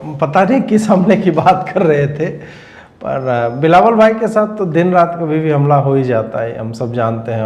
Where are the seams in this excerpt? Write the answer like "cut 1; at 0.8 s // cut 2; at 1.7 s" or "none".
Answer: none